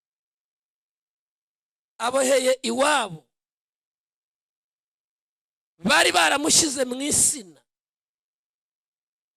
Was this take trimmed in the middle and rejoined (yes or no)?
no